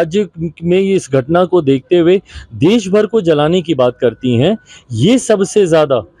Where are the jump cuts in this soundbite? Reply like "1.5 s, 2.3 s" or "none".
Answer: none